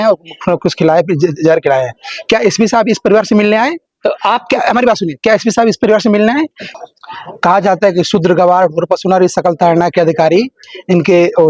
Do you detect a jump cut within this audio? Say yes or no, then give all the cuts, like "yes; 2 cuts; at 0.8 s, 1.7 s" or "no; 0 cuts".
yes; 1 cut; at 6.6 s